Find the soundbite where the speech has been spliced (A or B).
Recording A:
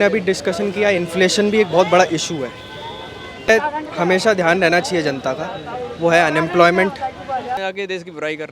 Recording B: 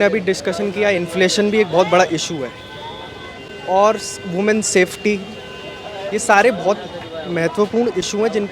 A